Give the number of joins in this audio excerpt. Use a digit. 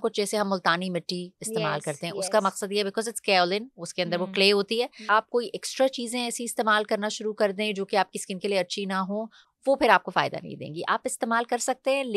1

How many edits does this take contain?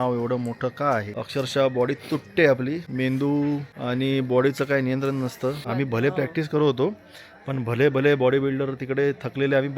4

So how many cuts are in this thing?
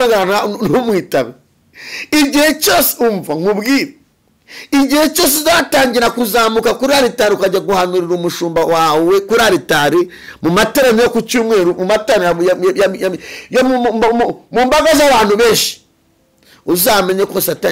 0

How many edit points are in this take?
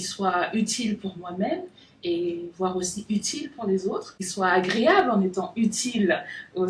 1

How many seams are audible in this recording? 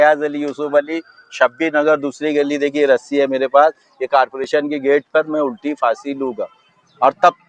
0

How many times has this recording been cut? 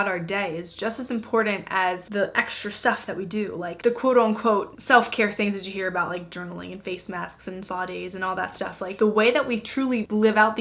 0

